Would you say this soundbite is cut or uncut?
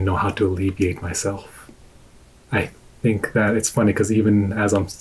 uncut